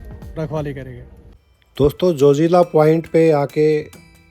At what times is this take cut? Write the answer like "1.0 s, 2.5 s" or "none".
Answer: 1.2 s